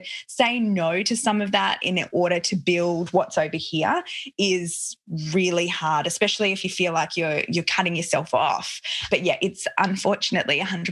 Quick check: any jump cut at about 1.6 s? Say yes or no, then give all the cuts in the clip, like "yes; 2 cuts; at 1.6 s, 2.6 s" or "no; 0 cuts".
no; 1 cut; at 9.0 s